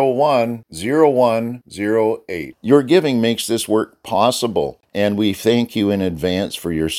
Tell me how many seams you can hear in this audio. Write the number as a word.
one